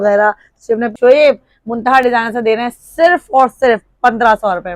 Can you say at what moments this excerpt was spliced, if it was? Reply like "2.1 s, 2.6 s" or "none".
0.9 s